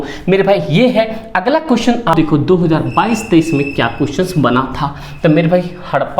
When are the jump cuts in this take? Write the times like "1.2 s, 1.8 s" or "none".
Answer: 2.1 s

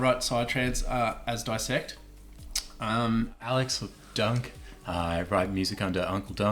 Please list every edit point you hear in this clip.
3.5 s

